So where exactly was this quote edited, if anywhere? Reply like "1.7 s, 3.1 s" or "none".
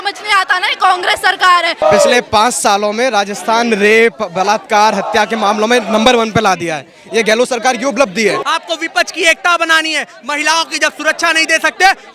1.8 s, 8.4 s